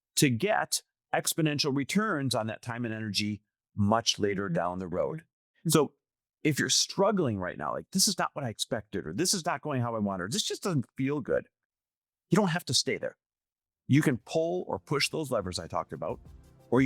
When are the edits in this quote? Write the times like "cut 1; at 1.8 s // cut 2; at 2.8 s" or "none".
cut 1; at 5.3 s